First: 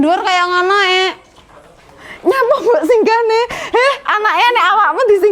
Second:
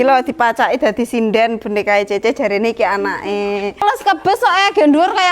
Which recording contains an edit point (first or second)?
second